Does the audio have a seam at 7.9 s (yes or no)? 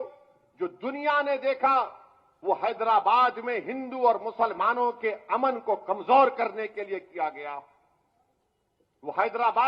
no